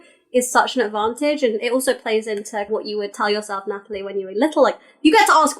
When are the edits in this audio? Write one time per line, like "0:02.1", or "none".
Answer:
0:02.7